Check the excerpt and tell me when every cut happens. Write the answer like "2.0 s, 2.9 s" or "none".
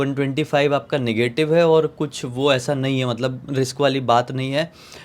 none